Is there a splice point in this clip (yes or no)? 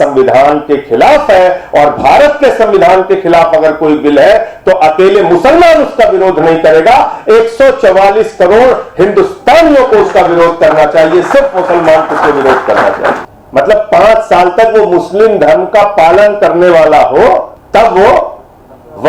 yes